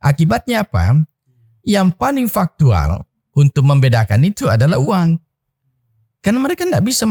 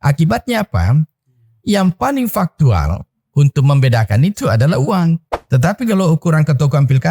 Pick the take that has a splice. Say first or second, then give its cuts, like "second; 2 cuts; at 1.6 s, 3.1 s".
second; 1 cut; at 5.4 s